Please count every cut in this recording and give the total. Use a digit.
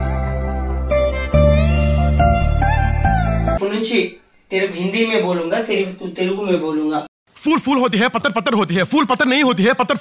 1